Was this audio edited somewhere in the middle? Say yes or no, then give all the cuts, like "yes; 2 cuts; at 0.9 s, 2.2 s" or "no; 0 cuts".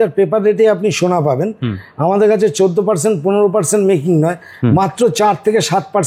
no; 0 cuts